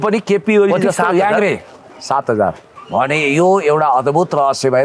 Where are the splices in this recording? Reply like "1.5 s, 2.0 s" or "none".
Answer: 2.7 s